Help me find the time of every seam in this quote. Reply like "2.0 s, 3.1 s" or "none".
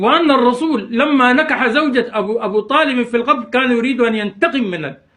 none